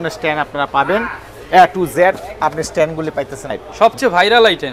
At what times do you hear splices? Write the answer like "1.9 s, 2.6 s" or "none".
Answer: 3.6 s